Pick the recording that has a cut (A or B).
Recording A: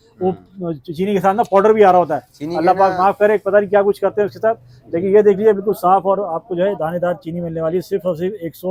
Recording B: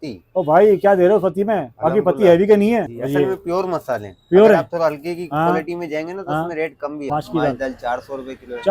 B